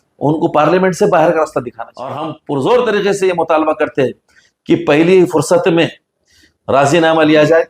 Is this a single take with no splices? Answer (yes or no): no